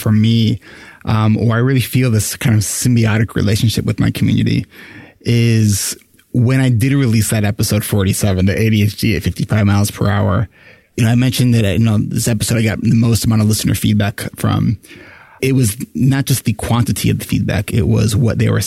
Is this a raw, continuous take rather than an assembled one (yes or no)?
no